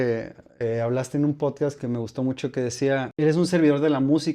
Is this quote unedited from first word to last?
no; 1 cut; at 3.1 s

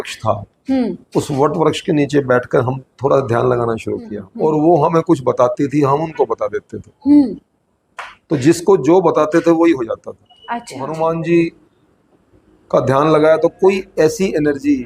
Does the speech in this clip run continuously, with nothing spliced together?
no; 2 cuts; at 4.2 s, 10.8 s

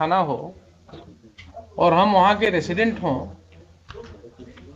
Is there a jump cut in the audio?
no; 0 cuts

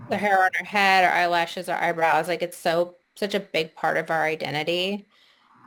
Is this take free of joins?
yes; 0 cuts

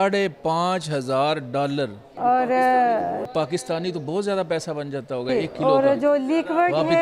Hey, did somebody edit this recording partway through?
no; 0 cuts

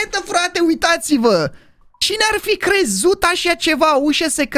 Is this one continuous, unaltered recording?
yes; 0 cuts

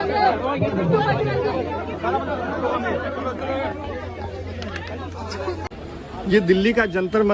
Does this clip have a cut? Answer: yes; 1 cut; at 5.6 s

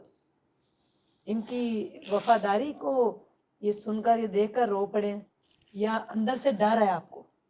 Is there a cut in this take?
no; 0 cuts

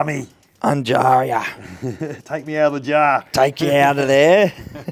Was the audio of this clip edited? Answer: no; 0 cuts

